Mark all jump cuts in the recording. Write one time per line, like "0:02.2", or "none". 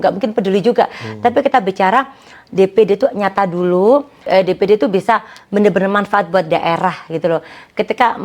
0:04.2